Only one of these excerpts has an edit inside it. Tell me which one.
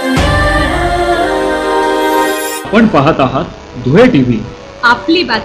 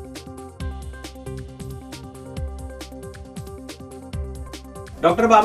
second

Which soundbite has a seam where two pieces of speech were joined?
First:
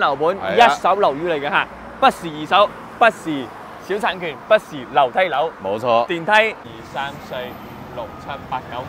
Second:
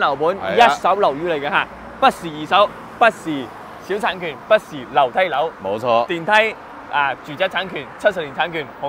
first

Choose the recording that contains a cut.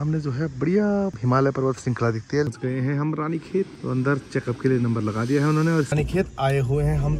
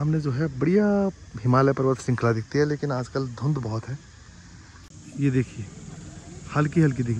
first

